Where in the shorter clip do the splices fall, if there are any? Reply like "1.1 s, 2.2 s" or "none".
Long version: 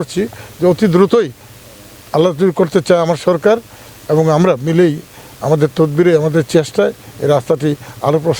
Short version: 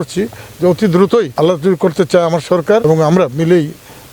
1.3 s, 2.8 s